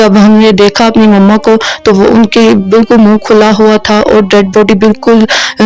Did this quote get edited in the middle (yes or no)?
no